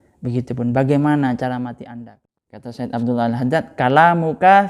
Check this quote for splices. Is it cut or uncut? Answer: cut